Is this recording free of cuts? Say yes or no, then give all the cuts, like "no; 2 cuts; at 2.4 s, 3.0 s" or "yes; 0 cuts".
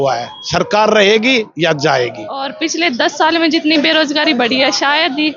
no; 1 cut; at 2.6 s